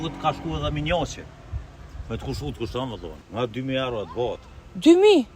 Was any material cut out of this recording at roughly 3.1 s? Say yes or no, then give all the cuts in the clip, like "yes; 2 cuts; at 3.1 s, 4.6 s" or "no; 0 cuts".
yes; 1 cut; at 3.1 s